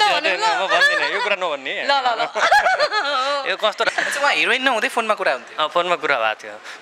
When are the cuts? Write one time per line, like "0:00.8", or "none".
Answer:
0:03.9